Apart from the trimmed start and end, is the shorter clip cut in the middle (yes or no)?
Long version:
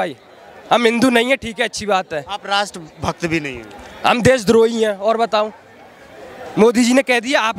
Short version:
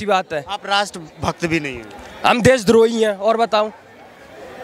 no